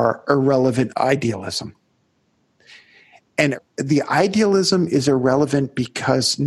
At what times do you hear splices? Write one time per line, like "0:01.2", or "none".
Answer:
0:00.9
0:03.5